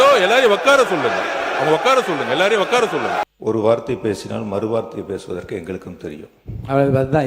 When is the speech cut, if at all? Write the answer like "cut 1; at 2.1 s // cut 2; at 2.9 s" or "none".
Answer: cut 1; at 3.2 s